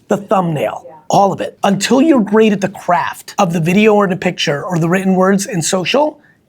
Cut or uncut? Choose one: cut